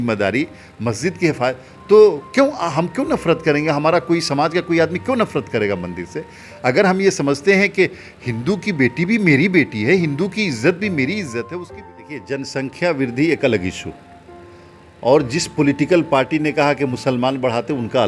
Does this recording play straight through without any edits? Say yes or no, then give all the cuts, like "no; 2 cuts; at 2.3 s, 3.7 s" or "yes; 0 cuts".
no; 1 cut; at 11.6 s